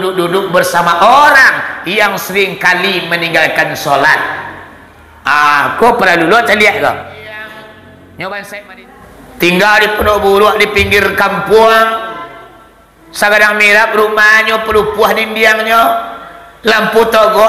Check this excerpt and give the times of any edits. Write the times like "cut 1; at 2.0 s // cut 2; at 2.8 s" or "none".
cut 1; at 8.7 s